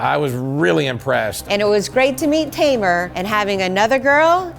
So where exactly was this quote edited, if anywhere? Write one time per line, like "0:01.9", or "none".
0:01.4
0:03.2